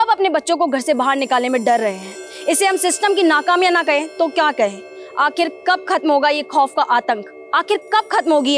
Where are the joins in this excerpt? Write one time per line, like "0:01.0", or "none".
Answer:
none